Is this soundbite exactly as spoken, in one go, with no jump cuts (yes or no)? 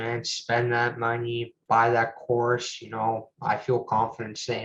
yes